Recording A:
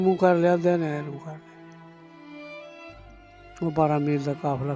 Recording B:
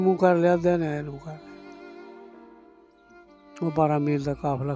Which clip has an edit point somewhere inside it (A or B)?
A